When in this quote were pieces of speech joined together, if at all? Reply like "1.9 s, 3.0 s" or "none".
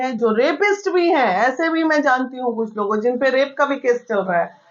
none